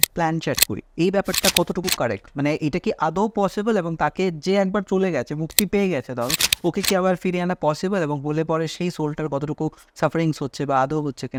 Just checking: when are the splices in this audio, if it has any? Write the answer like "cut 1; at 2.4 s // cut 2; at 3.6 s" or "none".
none